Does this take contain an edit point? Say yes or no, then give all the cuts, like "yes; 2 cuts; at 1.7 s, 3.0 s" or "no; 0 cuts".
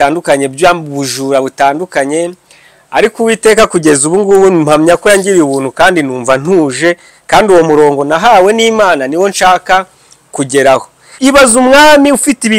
yes; 1 cut; at 11.1 s